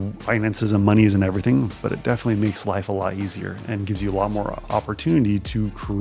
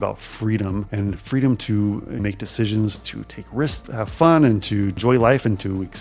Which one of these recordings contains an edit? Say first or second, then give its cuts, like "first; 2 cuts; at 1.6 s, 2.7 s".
second; 4 cuts; at 0.9 s, 2.2 s, 3.8 s, 5.0 s